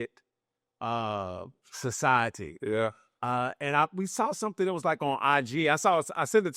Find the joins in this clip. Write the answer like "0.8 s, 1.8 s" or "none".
none